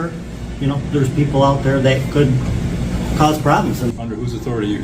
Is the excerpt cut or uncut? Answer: cut